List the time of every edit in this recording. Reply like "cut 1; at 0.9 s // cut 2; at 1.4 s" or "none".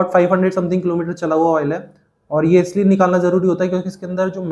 none